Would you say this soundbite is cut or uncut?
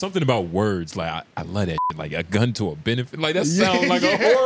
uncut